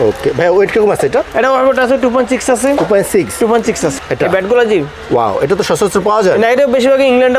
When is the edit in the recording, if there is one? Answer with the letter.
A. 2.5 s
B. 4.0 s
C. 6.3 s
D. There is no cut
B